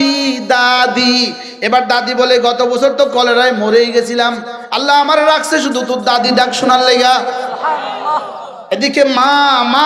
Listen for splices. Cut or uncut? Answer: cut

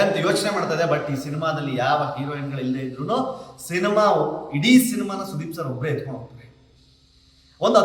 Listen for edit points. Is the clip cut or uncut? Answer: uncut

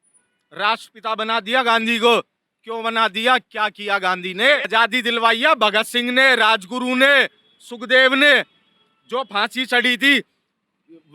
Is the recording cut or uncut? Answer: cut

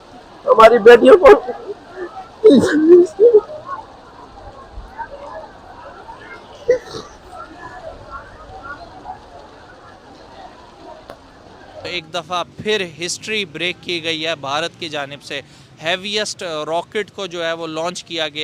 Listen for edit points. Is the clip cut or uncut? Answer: cut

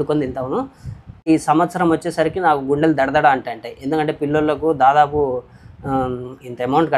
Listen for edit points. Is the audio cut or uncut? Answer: cut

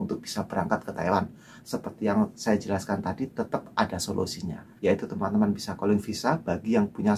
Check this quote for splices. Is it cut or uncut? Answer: uncut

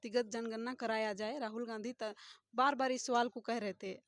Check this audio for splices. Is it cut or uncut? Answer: uncut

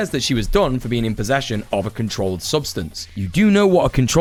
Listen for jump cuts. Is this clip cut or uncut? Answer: uncut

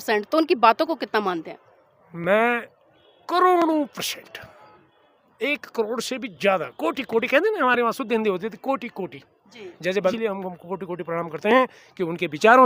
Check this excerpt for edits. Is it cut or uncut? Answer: cut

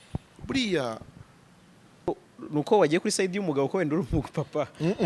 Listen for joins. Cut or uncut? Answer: cut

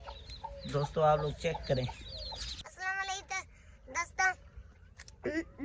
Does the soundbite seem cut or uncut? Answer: cut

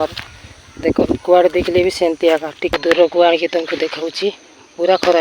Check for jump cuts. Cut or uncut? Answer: cut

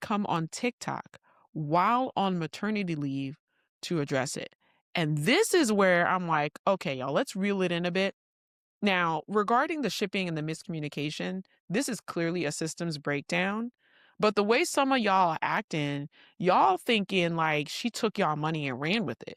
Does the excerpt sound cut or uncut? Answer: uncut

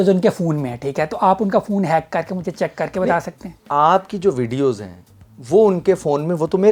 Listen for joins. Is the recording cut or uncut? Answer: uncut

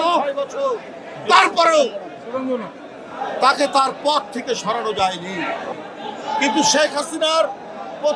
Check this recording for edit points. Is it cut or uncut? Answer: cut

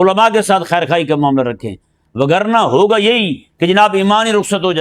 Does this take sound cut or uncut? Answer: uncut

